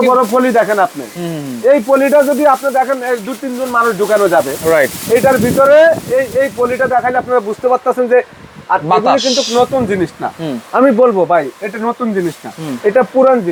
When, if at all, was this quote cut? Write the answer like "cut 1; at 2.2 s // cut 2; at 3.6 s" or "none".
none